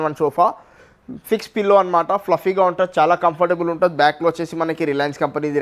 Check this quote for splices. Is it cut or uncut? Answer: uncut